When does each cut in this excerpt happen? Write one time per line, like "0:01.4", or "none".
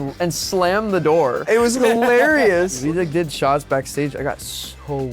0:01.4
0:02.8